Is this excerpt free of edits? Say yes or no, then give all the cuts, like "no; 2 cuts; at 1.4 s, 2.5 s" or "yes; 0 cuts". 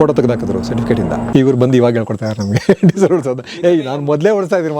no; 1 cut; at 1.2 s